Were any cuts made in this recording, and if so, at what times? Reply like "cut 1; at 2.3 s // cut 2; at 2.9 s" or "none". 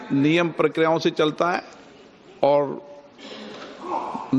cut 1; at 2.5 s